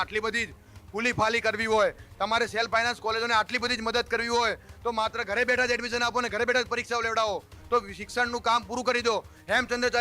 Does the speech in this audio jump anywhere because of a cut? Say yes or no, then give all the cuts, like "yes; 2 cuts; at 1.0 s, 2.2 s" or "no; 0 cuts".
no; 0 cuts